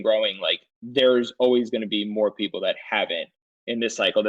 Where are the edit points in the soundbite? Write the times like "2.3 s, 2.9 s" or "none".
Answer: none